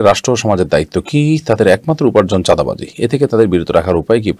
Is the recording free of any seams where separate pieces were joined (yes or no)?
yes